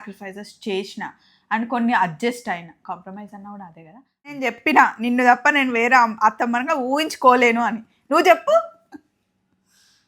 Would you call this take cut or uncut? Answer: cut